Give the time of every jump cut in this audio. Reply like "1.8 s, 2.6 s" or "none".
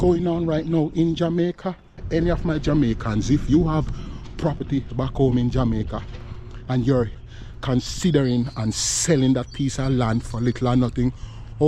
2.0 s, 7.2 s